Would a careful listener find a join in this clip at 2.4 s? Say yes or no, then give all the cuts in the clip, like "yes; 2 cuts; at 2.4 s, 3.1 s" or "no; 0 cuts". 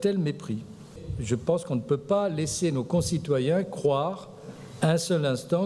no; 1 cut; at 0.9 s